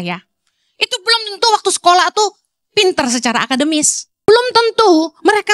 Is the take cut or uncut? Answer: cut